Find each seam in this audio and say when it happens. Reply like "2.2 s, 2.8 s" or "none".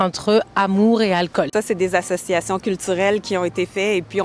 1.5 s